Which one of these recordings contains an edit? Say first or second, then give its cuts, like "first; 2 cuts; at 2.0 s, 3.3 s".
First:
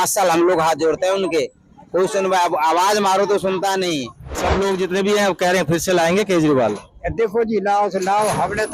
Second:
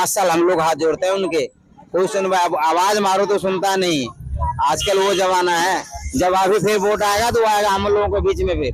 first; 1 cut; at 4.2 s